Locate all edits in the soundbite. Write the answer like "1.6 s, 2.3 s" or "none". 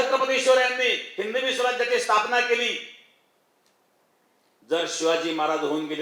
none